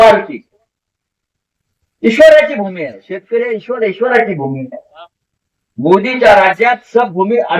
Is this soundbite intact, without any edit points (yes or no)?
yes